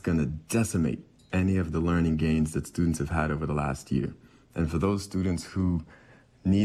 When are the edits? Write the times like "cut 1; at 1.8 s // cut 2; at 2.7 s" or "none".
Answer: none